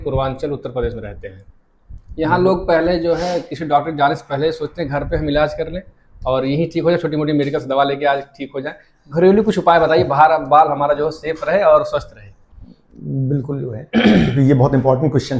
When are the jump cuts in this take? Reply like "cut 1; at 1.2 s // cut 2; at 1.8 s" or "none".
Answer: none